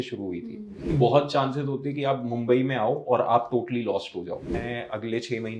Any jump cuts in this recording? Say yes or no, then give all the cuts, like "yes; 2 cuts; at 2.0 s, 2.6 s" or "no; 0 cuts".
yes; 2 cuts; at 0.9 s, 4.6 s